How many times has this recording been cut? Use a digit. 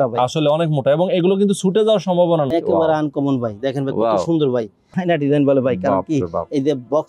2